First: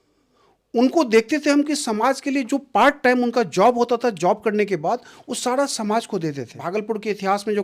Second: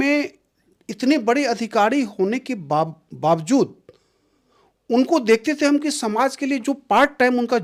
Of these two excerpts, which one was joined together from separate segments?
first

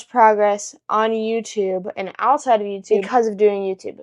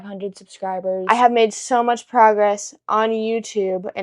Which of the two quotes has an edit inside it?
second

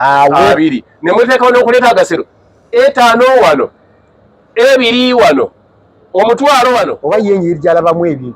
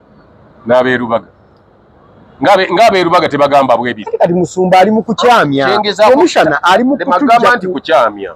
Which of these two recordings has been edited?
first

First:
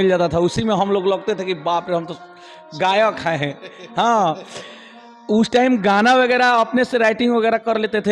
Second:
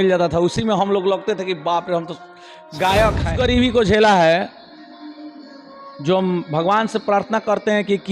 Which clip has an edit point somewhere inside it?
second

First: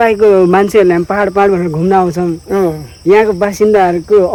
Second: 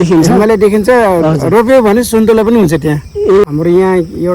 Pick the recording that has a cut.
second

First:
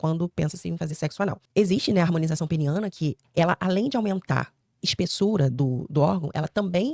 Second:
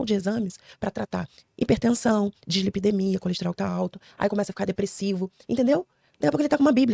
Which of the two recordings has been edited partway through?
first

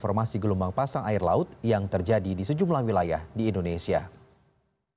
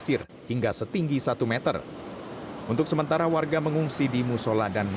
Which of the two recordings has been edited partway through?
second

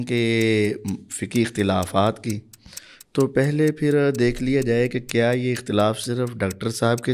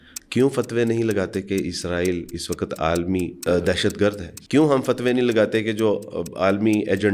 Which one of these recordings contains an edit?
second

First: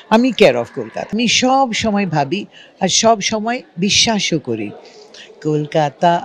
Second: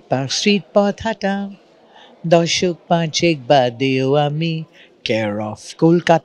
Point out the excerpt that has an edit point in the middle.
first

